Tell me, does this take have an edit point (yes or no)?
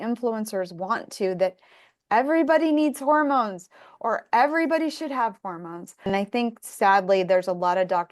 yes